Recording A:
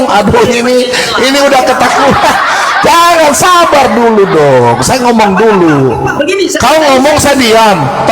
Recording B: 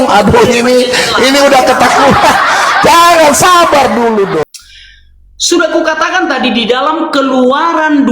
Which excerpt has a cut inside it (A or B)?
B